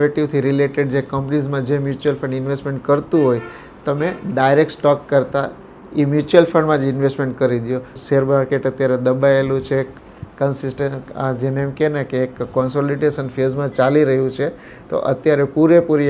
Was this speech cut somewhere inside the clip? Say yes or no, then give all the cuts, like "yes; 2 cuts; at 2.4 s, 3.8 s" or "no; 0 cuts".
yes; 1 cut; at 8.0 s